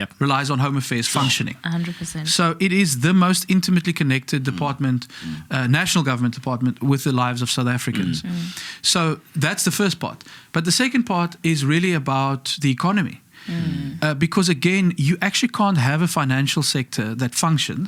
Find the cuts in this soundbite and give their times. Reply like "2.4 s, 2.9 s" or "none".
none